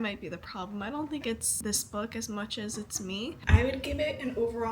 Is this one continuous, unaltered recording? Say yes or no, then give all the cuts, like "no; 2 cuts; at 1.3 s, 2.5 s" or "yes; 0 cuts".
no; 2 cuts; at 1.5 s, 3.4 s